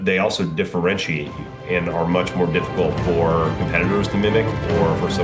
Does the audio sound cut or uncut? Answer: uncut